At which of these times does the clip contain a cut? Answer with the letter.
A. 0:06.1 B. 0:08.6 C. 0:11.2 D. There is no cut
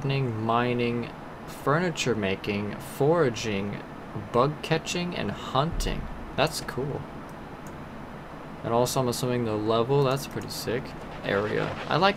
C